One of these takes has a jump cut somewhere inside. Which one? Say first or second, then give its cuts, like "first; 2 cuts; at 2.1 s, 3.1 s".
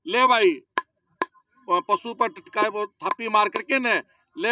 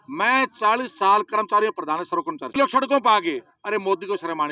second; 1 cut; at 2.5 s